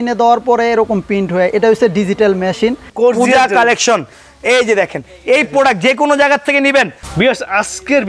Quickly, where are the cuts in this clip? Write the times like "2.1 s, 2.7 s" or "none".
2.8 s, 7.0 s